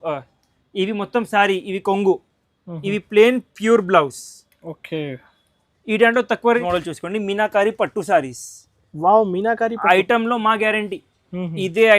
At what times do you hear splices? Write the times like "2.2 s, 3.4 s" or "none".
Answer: 6.6 s